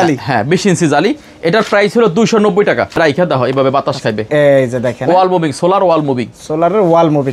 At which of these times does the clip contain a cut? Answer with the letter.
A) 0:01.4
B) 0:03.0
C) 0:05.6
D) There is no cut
B